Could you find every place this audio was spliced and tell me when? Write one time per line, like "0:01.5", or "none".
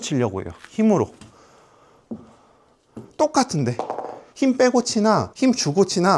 0:05.3